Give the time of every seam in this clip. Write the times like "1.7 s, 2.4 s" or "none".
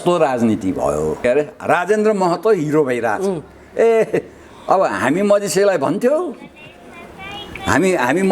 1.2 s